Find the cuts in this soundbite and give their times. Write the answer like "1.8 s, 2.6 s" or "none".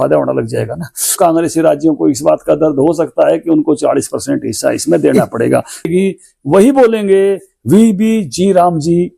1.1 s, 5.9 s